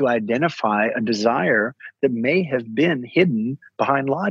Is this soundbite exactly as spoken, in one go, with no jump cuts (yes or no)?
yes